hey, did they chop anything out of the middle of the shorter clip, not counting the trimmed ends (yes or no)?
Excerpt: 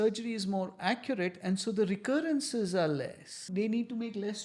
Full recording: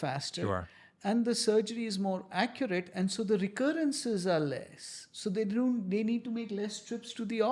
yes